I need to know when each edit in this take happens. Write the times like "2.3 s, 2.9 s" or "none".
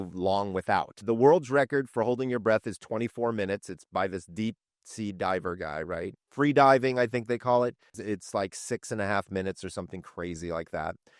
1.0 s, 6.2 s